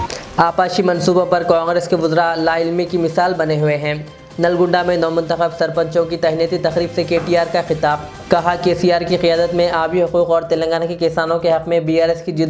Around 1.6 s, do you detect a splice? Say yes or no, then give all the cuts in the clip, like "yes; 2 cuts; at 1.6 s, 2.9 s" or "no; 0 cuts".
no; 0 cuts